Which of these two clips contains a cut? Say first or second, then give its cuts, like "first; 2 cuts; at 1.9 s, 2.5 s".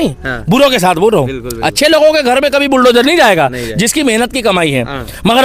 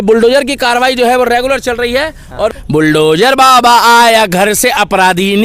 second; 1 cut; at 2.6 s